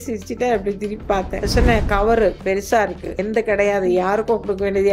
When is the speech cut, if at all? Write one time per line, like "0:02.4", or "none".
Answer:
0:01.4
0:03.2